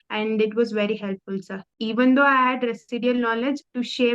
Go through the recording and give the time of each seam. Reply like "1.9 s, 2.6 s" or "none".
1.8 s